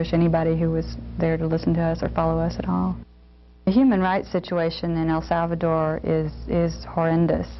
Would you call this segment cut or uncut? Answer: cut